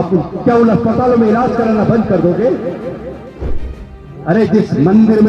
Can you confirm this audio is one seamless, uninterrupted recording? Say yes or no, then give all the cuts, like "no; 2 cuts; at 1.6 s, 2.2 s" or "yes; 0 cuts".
no; 1 cut; at 3.5 s